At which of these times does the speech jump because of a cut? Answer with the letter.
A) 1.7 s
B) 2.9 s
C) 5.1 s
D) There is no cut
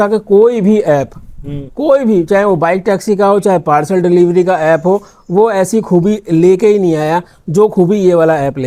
D